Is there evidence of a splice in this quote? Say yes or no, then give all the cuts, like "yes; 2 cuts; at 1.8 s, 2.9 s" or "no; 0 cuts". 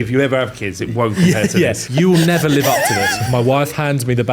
yes; 2 cuts; at 1.8 s, 3.2 s